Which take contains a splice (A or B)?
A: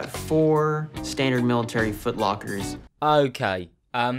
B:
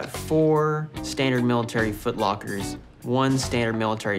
B